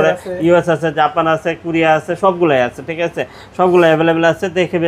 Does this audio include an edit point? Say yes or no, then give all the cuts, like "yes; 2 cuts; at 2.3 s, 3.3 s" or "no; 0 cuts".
no; 0 cuts